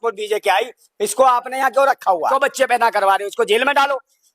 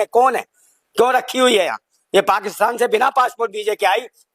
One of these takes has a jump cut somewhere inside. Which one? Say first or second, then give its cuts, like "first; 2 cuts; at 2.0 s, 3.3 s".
first; 1 cut; at 2.3 s